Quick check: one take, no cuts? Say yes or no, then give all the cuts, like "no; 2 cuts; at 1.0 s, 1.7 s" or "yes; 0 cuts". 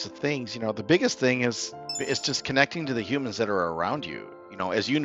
yes; 0 cuts